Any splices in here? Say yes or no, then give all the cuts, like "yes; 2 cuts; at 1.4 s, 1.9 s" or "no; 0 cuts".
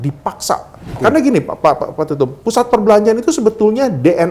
yes; 1 cut; at 1.0 s